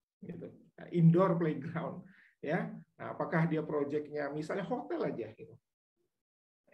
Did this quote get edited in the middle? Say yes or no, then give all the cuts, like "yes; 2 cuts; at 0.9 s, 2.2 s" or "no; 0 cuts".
no; 0 cuts